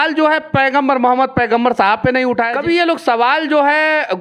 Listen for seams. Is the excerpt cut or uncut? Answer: cut